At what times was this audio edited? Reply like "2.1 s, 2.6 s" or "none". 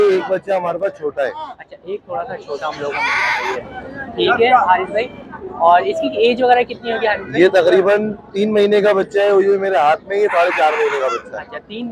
none